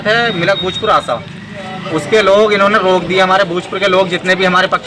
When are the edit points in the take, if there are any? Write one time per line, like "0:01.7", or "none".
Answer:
none